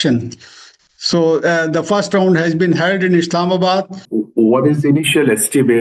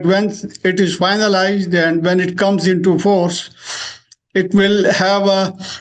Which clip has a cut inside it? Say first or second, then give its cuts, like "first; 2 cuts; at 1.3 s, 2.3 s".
first; 1 cut; at 4.0 s